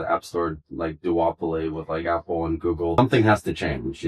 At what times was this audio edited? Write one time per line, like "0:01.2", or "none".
0:03.0